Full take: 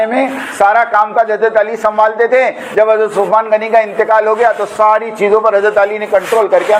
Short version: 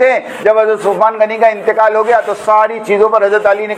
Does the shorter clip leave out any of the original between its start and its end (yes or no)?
no